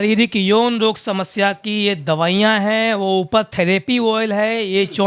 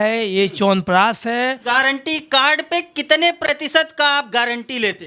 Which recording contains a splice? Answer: second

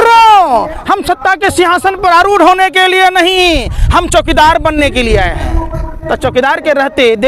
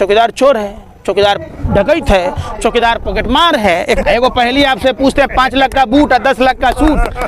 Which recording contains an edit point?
second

